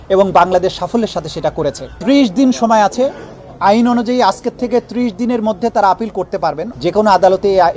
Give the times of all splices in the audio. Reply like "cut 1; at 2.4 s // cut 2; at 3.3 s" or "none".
cut 1; at 1.9 s // cut 2; at 6.7 s

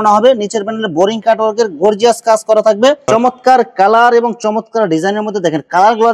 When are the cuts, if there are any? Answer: cut 1; at 3.0 s

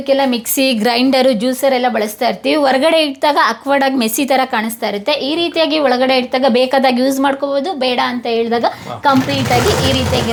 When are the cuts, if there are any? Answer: none

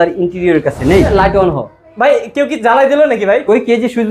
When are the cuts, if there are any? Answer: cut 1; at 1.1 s

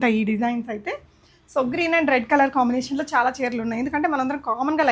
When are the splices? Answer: none

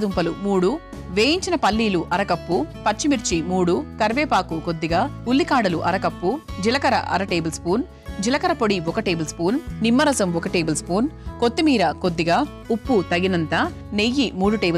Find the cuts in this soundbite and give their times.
cut 1; at 13.8 s

